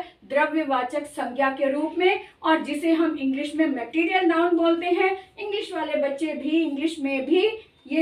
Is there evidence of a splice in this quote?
no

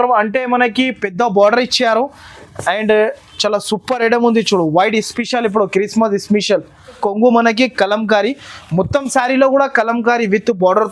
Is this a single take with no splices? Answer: no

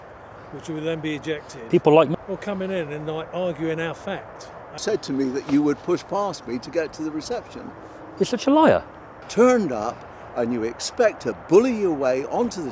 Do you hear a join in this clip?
yes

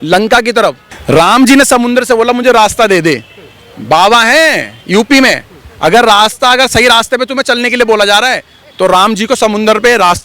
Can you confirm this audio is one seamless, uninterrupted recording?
no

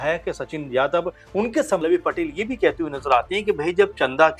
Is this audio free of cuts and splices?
no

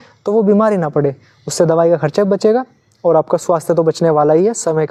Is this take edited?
no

